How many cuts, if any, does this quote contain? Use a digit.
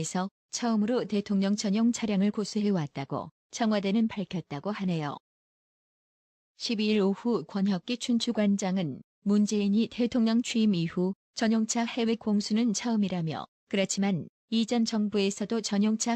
0